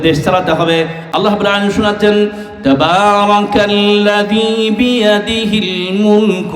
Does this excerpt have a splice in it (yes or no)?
yes